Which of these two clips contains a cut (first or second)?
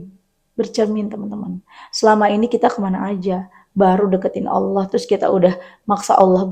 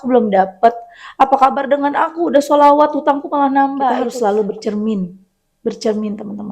second